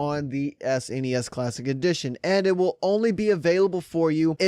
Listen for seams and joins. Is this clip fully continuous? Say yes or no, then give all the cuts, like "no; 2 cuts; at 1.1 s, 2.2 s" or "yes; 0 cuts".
no; 1 cut; at 1.6 s